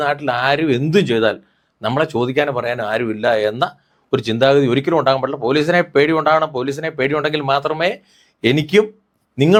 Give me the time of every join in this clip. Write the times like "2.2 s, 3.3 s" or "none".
none